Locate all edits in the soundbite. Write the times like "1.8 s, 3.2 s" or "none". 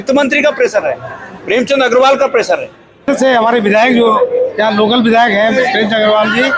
3.1 s